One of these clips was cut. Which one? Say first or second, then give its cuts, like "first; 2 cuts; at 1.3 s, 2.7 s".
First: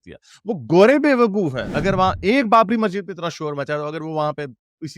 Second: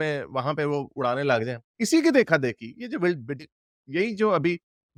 first; 1 cut; at 1.7 s